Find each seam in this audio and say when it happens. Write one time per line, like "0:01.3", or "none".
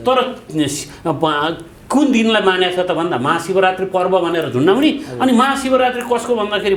none